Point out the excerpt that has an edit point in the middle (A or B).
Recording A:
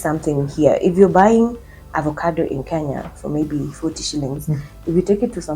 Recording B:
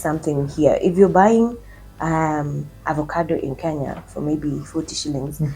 A